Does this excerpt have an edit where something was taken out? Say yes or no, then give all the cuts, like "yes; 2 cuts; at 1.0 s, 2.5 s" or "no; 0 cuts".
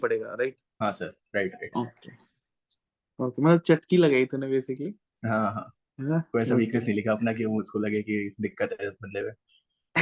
no; 0 cuts